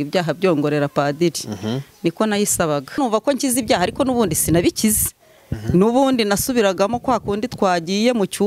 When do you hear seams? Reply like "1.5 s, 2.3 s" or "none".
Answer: 3.0 s